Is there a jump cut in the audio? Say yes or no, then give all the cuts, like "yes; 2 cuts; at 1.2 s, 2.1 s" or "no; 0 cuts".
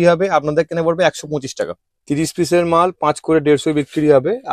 yes; 1 cut; at 1.9 s